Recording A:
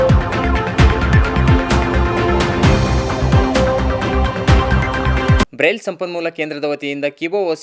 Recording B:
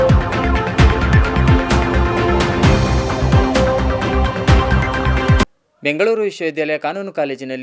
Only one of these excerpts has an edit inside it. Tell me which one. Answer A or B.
B